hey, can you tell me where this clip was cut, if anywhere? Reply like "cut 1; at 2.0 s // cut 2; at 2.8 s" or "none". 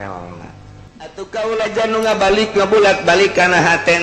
cut 1; at 1.2 s